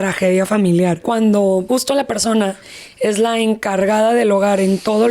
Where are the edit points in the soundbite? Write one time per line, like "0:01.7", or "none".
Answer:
0:01.0
0:01.7